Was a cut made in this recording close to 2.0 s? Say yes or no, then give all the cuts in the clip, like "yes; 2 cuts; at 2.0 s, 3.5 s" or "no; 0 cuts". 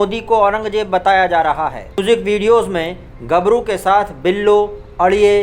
yes; 1 cut; at 2.0 s